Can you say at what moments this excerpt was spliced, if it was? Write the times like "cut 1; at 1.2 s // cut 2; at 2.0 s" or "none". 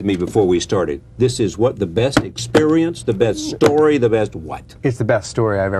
cut 1; at 0.9 s